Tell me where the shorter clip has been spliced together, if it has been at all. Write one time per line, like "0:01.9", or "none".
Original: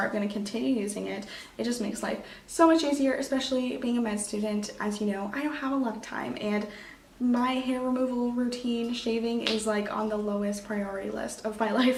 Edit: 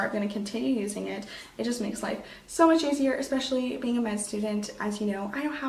none